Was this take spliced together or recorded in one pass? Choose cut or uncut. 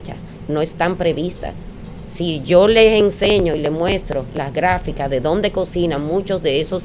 uncut